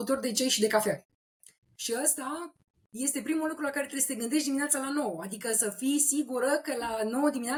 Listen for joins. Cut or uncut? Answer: uncut